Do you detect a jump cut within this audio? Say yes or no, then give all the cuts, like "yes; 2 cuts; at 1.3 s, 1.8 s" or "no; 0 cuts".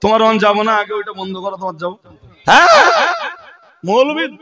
yes; 1 cut; at 2.2 s